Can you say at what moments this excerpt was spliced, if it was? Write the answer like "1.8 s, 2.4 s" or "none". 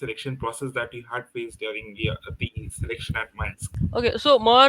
3.7 s